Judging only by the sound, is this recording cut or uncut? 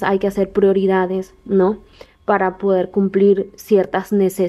uncut